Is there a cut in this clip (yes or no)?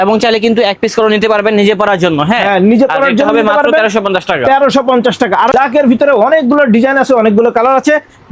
yes